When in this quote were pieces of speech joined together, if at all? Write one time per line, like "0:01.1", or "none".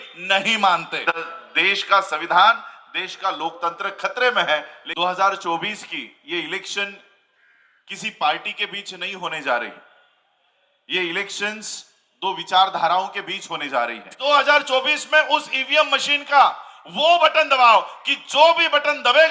0:01.1
0:04.8
0:14.1